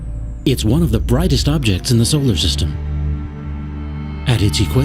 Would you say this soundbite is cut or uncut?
cut